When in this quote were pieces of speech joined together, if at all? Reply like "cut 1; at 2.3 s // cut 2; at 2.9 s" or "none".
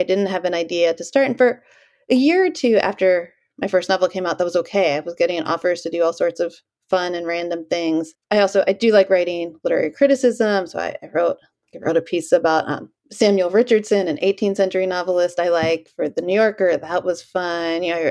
none